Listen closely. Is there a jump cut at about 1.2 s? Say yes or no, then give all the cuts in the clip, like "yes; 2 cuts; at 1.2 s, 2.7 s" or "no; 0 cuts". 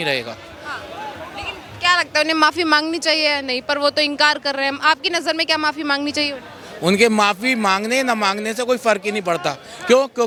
no; 0 cuts